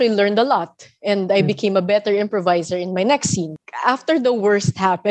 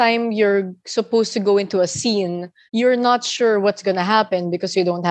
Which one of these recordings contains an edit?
first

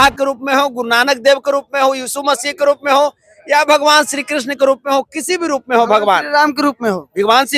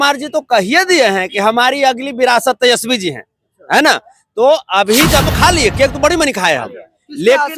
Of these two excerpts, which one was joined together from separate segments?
second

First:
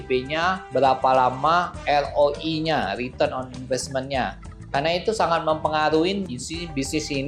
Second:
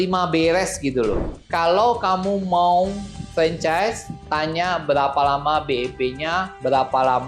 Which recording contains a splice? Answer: second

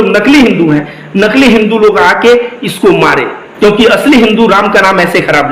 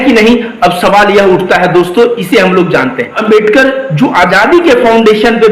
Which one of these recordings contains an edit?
second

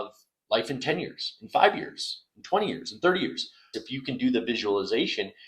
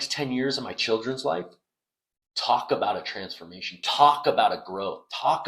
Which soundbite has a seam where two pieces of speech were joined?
first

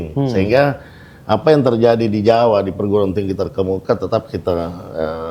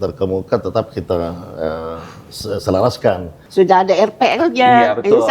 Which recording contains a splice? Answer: second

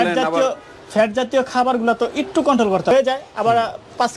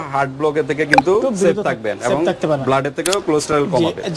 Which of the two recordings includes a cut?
first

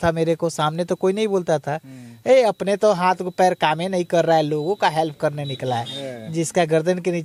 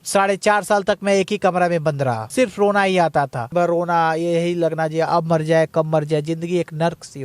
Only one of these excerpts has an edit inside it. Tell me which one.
second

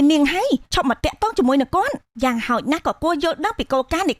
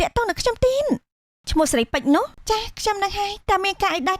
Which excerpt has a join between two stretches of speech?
second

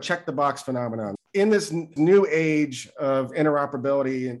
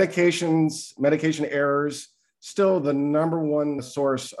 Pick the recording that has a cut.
first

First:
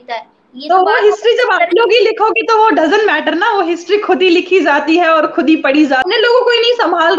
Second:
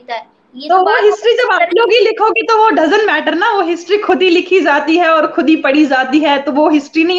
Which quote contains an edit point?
first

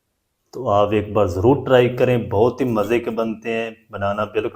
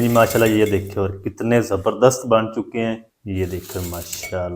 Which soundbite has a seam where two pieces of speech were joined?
second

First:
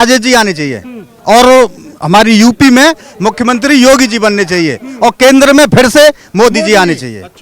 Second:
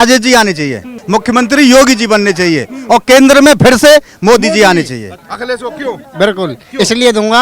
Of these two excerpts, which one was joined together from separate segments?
second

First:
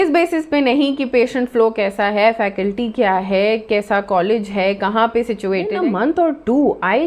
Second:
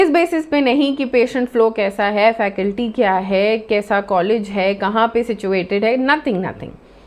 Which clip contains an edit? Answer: first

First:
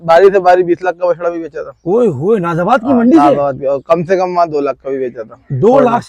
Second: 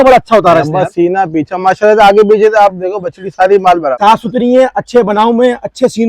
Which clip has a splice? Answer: second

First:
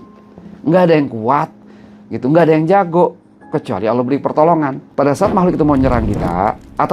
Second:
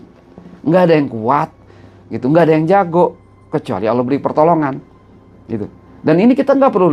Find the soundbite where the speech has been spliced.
first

